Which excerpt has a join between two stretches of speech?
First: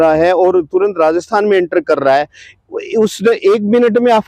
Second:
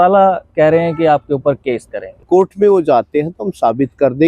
second; 1 cut; at 2.2 s

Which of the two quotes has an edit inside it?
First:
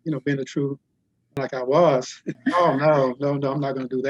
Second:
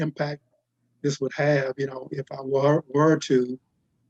first; 2 cuts; at 1.4 s, 2.3 s

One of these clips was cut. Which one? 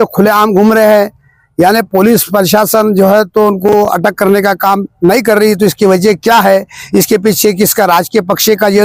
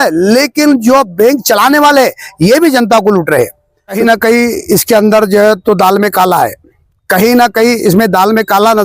second; 1 cut; at 4.0 s

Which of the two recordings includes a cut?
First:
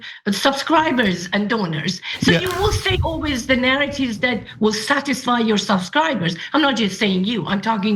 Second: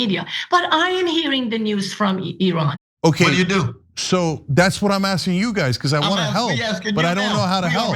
second; 1 cut; at 2.8 s

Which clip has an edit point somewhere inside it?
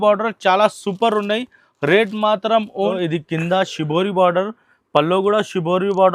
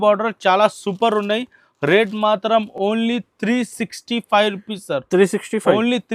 first; 1 cut; at 2.7 s

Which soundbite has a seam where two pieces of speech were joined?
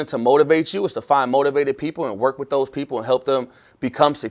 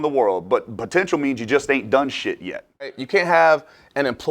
second; 1 cut; at 3.0 s

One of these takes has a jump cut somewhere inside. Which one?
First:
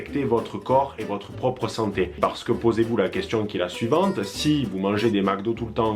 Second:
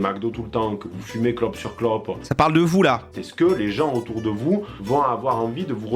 second; 2 cuts; at 2.2 s, 3.1 s

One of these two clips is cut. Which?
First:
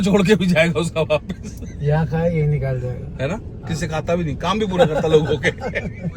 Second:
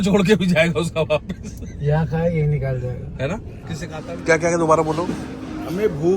second; 1 cut; at 3.9 s

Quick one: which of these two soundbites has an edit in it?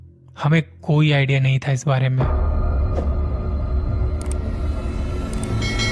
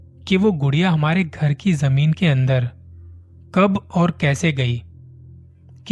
first; 1 cut; at 2.2 s

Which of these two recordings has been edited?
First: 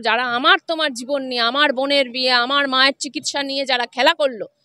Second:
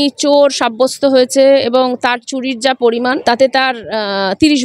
second; 1 cut; at 3.2 s

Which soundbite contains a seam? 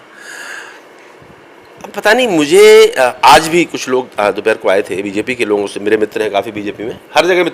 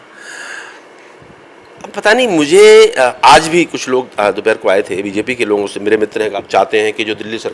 second; 1 cut; at 6.4 s

